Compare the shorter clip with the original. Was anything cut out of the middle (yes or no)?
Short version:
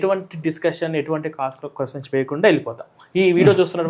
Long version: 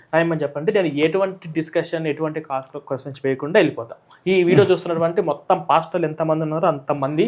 no